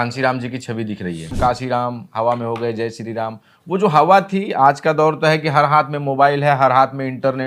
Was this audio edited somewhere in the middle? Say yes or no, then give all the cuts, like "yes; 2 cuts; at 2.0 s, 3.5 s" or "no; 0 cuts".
yes; 1 cut; at 1.3 s